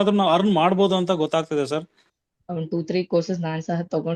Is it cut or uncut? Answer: cut